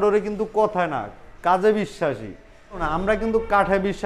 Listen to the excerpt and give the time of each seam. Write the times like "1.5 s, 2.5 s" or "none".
2.8 s